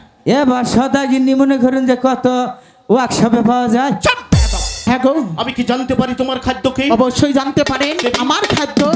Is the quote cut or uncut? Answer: cut